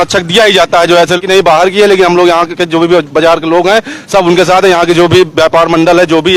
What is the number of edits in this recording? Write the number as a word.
zero